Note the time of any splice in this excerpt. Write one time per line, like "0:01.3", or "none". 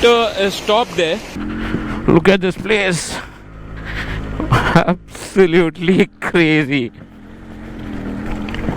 0:01.4